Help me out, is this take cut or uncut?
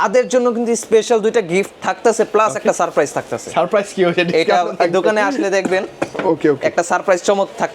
uncut